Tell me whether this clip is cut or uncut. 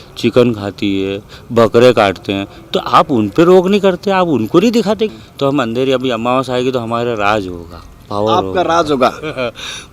cut